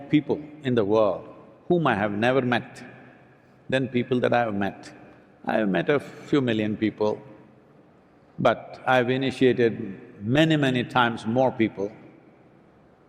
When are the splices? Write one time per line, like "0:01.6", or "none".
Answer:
none

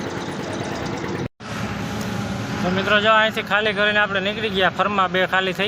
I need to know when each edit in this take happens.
0:01.3

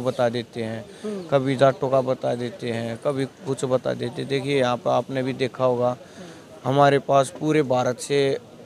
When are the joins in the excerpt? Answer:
none

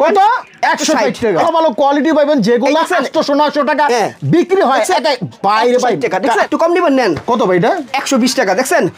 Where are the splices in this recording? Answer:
0:01.4
0:06.5

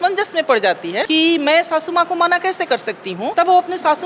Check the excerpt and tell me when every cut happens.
0:01.0
0:03.3

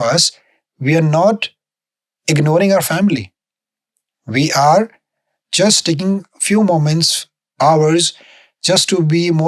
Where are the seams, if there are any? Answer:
none

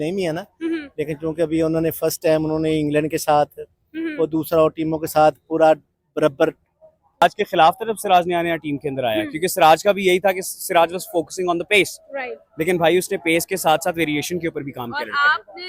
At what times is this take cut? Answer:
0:07.2

